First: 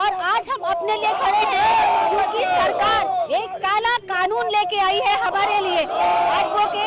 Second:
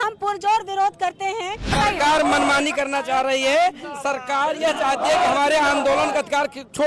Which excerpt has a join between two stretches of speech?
second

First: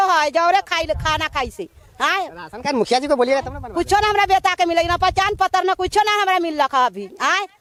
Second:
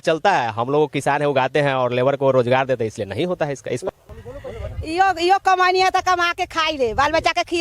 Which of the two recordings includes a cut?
second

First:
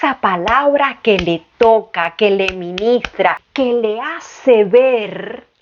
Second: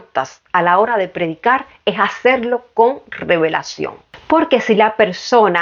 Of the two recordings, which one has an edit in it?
first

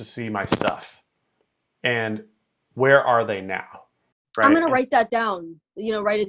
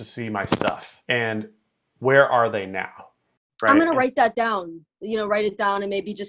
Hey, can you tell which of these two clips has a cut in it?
second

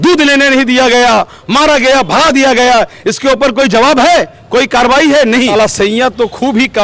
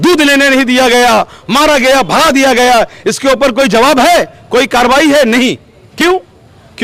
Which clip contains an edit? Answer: first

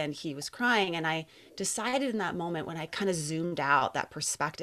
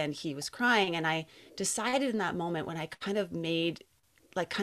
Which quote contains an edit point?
first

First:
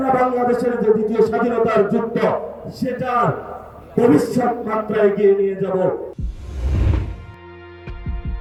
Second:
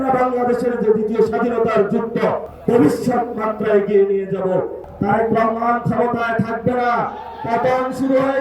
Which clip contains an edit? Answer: second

